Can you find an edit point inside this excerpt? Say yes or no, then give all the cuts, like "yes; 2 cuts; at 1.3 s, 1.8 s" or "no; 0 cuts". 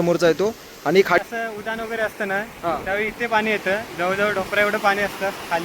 yes; 1 cut; at 1.2 s